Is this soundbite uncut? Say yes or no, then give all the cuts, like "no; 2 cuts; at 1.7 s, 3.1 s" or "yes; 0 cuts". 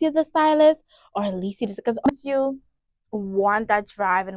no; 1 cut; at 2.1 s